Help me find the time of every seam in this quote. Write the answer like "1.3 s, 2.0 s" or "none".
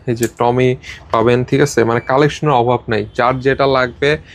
none